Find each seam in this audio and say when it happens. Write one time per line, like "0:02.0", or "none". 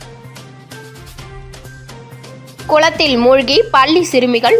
0:00.8
0:02.2